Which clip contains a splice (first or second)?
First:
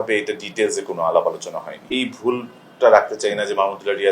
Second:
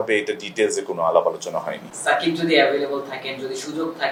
first